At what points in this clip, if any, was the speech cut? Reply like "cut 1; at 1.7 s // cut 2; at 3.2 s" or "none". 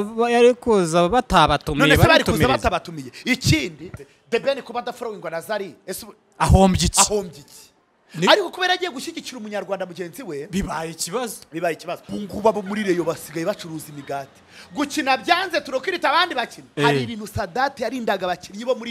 cut 1; at 3.9 s // cut 2; at 12.2 s // cut 3; at 16.7 s